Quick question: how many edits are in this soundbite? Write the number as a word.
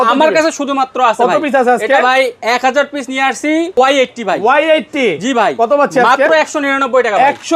one